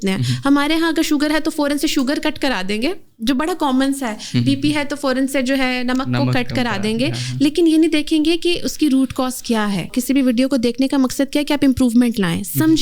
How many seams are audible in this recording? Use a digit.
1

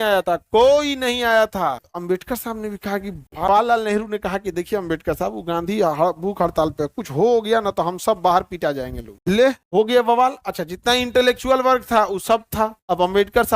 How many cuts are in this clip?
3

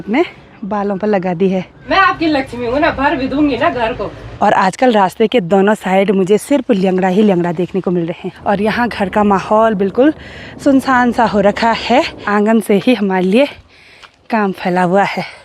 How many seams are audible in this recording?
4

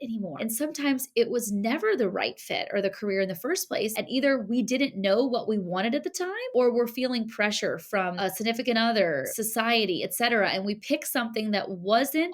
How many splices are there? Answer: 1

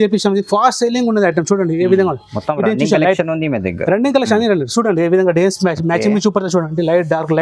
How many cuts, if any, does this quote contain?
0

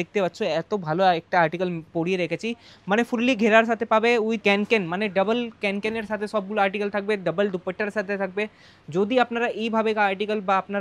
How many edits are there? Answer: 0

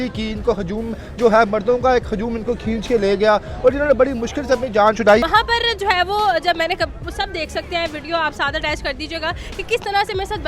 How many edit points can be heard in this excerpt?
1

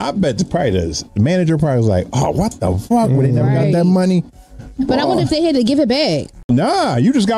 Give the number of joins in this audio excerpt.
1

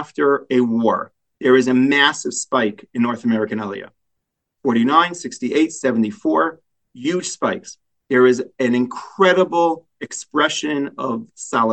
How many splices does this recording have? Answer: 0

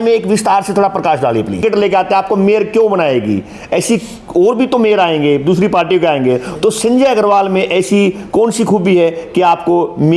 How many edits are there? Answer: 1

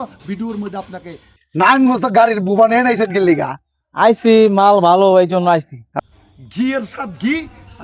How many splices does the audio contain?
2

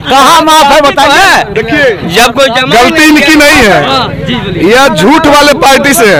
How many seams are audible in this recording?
0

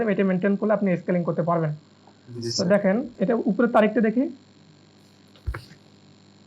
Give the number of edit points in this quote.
1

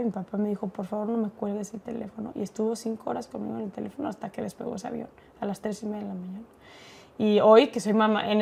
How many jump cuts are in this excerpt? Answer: 0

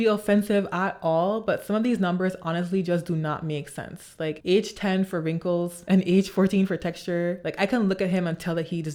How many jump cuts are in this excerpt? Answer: 0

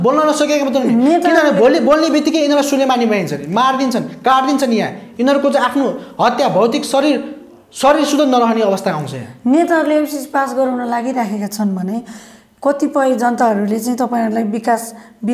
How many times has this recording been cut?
0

